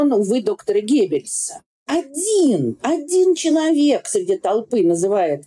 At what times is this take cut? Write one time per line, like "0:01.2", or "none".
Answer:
0:01.8